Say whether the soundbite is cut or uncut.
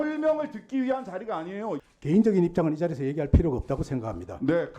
cut